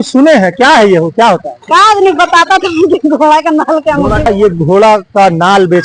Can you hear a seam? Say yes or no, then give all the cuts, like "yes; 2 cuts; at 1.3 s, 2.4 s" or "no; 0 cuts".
yes; 2 cuts; at 1.5 s, 4.3 s